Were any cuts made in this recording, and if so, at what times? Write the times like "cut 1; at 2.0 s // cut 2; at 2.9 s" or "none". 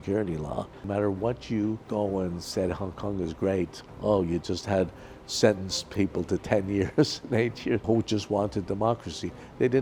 cut 1; at 0.8 s // cut 2; at 1.8 s // cut 3; at 3.8 s // cut 4; at 7.8 s